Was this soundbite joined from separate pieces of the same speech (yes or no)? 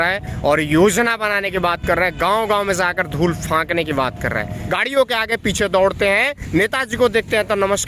yes